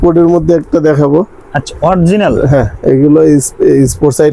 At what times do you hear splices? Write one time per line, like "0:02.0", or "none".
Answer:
none